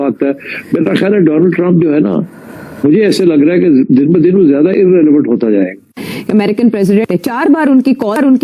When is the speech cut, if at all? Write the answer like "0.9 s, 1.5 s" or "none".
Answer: 6.1 s, 7.0 s